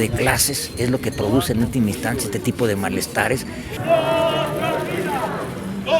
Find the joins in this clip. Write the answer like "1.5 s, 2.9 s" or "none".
3.8 s